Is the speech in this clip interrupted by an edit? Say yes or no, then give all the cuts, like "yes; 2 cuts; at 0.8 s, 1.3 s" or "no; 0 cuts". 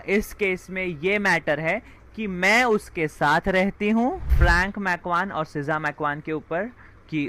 yes; 1 cut; at 4.3 s